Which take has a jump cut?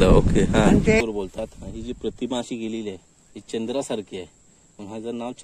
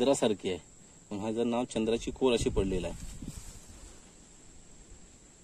first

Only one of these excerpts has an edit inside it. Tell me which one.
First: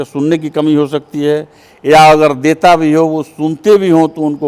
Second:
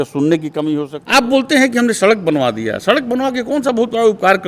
second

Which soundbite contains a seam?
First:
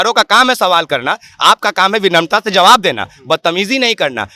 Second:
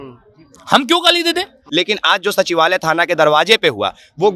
second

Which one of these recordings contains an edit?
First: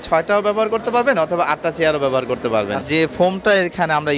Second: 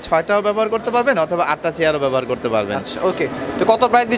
first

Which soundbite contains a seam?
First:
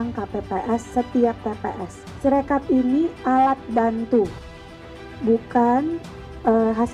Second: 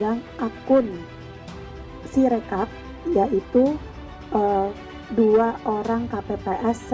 first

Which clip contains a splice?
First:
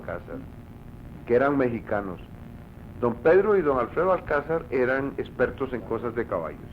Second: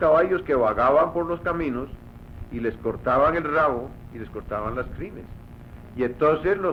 first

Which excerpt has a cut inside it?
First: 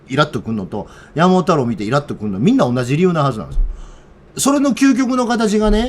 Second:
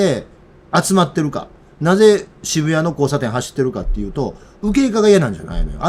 first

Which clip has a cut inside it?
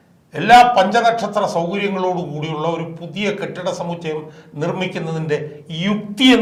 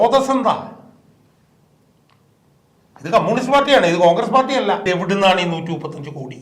second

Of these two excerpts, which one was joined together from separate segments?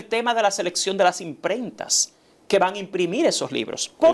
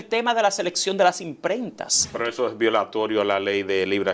second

